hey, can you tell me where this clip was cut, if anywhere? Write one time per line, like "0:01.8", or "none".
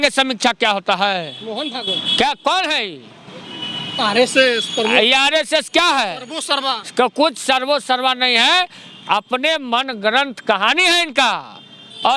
none